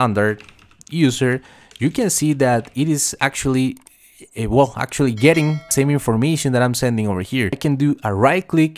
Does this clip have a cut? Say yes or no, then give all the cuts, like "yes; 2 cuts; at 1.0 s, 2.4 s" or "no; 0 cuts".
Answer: yes; 2 cuts; at 5.6 s, 7.6 s